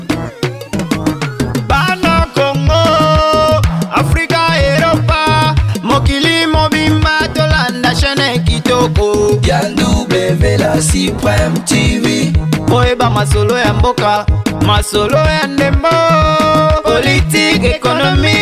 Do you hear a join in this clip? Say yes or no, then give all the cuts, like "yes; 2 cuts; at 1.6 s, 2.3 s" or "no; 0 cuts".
no; 0 cuts